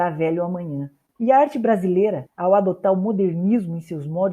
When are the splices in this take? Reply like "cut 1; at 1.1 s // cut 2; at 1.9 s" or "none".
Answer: cut 1; at 1.0 s